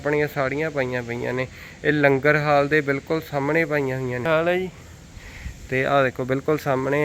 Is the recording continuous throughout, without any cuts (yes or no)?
yes